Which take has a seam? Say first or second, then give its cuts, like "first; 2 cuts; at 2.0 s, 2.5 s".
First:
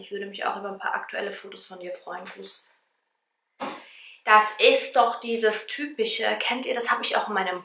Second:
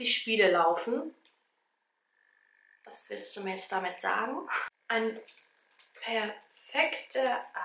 second; 1 cut; at 4.7 s